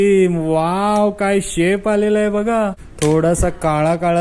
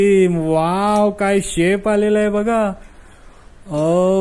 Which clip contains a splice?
first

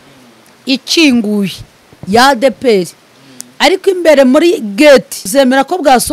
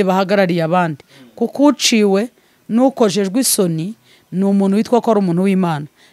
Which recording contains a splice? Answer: first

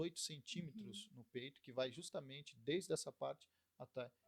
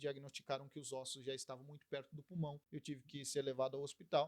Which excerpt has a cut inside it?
second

